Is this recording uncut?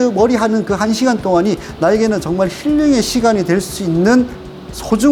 yes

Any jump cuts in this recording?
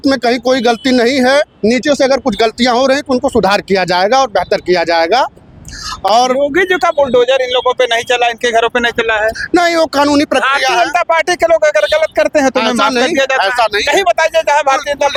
no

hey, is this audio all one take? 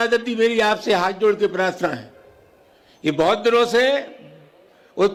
yes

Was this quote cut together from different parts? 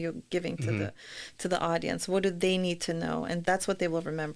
yes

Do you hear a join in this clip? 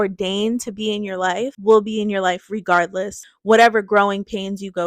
yes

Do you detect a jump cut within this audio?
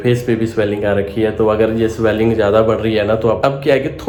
no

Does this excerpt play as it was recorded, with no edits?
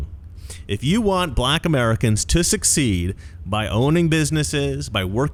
yes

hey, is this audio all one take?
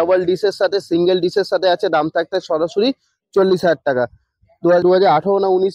no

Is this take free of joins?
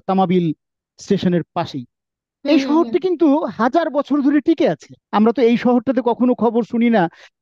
no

